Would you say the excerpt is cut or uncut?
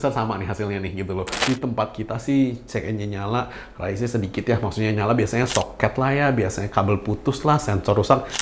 cut